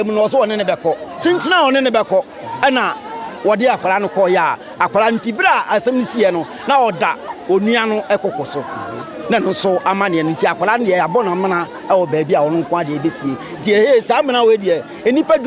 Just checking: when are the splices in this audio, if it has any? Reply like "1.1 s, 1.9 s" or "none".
none